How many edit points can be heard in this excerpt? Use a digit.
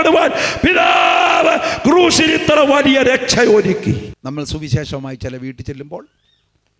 1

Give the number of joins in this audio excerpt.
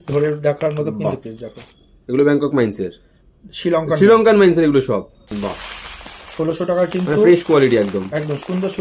1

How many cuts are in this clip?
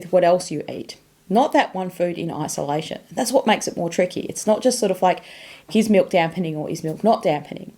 1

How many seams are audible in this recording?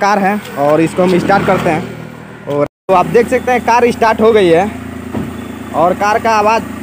1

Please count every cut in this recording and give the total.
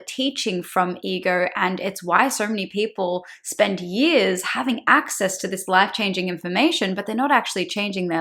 0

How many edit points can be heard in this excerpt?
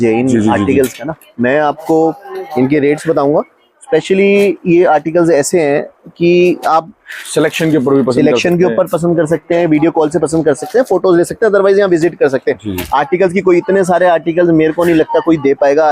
0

